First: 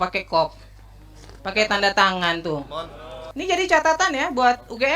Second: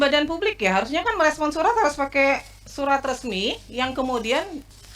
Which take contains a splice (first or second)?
first